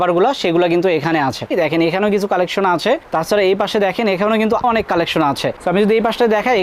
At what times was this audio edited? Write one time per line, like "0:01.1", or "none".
0:01.5
0:04.6